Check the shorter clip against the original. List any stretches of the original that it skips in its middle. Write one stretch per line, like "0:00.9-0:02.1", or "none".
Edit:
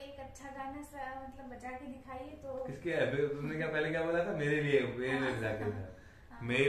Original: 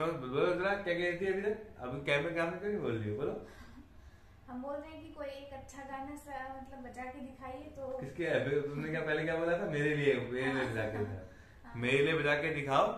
none